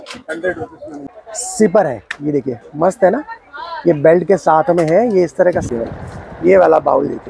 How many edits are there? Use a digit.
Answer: 2